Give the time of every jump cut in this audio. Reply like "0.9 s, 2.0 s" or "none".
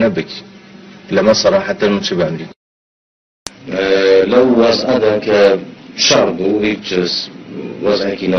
3.2 s